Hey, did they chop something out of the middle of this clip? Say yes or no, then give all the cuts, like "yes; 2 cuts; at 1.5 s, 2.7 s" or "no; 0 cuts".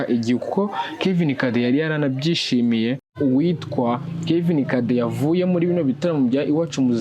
yes; 1 cut; at 3.1 s